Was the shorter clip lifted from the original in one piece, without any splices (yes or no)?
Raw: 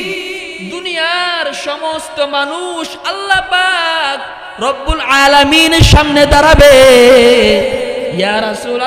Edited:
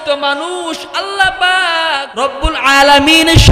no